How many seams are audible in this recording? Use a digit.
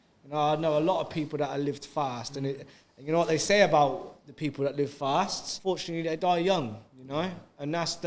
1